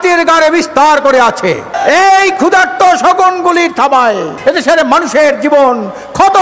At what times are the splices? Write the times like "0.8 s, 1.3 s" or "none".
1.7 s, 4.3 s